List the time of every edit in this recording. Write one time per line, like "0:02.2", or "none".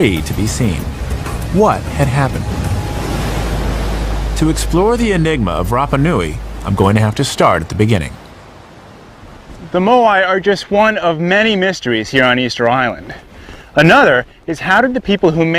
0:09.7